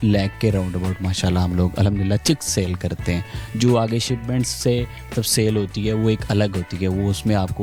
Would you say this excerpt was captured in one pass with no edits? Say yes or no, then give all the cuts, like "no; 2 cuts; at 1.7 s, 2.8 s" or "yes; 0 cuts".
yes; 0 cuts